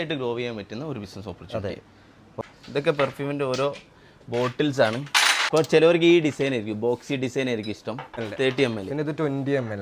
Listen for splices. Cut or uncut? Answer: cut